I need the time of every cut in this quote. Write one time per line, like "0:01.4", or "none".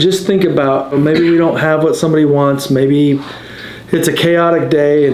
0:00.9